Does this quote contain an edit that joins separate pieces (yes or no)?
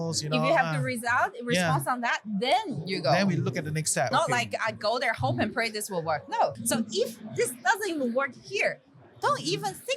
yes